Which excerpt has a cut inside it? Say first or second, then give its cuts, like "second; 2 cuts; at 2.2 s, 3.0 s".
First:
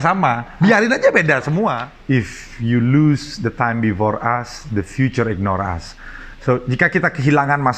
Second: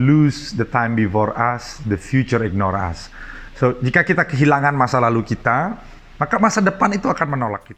first; 1 cut; at 1.9 s